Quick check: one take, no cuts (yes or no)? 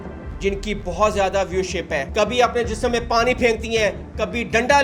no